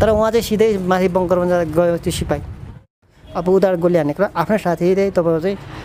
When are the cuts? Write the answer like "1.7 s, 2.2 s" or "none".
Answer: 2.9 s